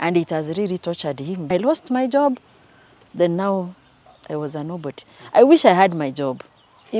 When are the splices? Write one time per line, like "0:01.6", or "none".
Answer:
0:01.5